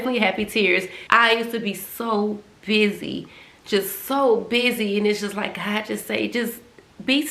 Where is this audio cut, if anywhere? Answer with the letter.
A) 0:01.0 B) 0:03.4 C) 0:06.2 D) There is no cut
A